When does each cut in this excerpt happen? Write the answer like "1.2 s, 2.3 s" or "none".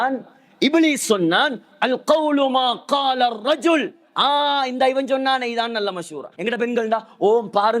6.4 s